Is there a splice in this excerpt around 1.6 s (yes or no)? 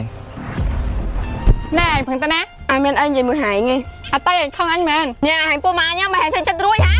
yes